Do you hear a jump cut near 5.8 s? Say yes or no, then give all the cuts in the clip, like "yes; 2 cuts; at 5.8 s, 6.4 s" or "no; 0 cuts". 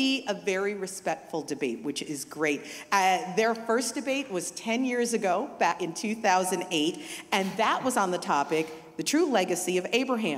yes; 1 cut; at 5.8 s